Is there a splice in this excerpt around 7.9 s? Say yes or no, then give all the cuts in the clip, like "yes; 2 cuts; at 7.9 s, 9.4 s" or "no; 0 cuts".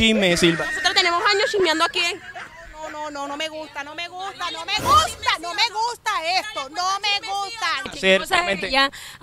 yes; 1 cut; at 7.9 s